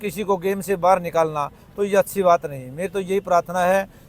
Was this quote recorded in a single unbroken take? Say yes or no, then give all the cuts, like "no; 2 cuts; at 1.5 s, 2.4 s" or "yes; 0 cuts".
yes; 0 cuts